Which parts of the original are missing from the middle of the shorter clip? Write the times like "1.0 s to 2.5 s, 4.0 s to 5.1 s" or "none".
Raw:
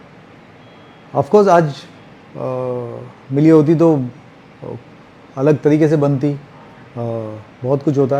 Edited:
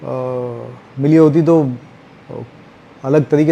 none